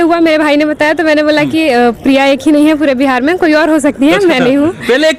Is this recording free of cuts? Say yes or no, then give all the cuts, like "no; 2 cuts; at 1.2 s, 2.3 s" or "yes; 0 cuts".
yes; 0 cuts